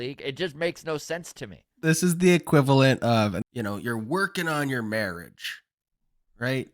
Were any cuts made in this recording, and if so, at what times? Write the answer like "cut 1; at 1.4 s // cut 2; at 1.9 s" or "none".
cut 1; at 1.7 s // cut 2; at 3.4 s